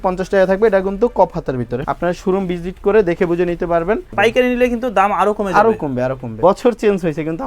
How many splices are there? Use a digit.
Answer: 3